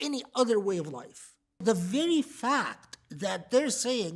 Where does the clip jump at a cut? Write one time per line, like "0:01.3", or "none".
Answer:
0:01.6

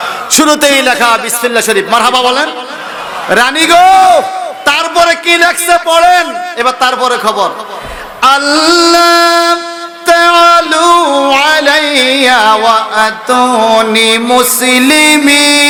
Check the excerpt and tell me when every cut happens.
none

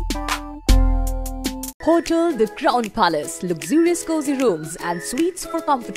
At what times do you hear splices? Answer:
0:01.7

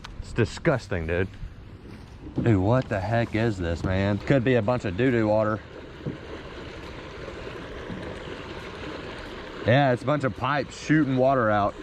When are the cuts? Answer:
0:04.2

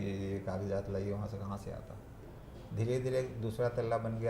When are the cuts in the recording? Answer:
0:02.2

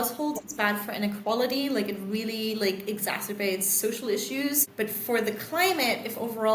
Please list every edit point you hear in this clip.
0:04.7

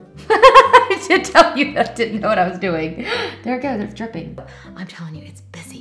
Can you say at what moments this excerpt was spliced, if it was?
0:04.4

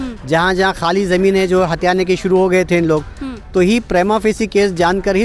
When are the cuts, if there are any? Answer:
none

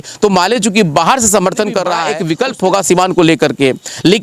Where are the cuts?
0:02.1

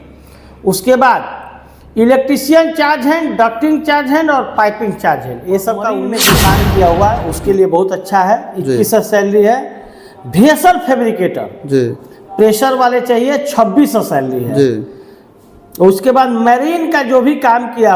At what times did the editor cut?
0:06.1

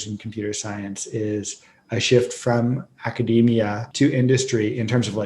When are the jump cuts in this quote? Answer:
0:03.8

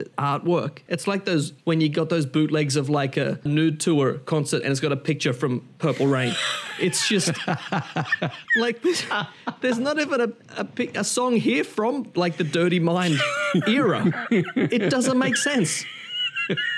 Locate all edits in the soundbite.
0:00.8
0:03.4
0:08.4

